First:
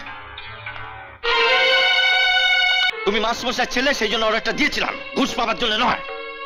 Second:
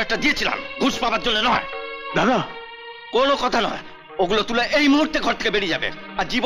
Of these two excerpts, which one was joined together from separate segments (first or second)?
first